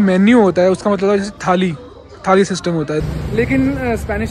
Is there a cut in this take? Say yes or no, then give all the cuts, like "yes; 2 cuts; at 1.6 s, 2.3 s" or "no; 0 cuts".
yes; 1 cut; at 3.0 s